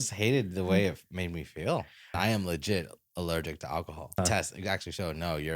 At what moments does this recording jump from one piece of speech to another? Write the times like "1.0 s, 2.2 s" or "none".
2.2 s, 4.2 s

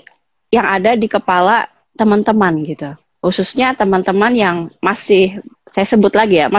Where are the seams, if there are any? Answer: 5.5 s

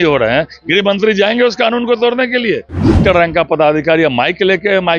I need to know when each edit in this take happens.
3.0 s

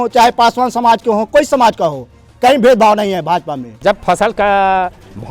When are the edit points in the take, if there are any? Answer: 3.7 s

